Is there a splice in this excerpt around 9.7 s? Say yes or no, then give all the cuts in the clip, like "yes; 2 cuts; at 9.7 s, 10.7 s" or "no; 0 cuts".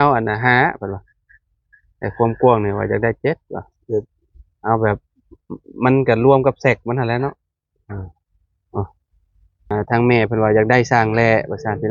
yes; 1 cut; at 9.7 s